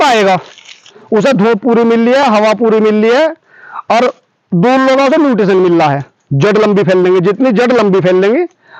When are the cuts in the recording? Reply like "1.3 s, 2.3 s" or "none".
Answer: none